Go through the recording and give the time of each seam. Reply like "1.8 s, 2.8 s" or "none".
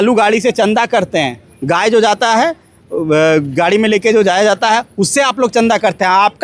none